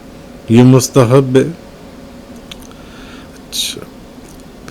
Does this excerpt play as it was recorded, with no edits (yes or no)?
yes